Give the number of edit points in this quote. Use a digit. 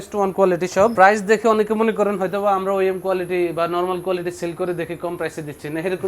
1